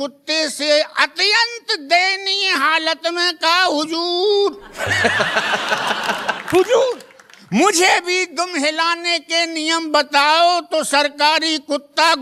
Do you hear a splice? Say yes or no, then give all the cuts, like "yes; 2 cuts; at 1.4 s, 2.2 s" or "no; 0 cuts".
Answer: no; 0 cuts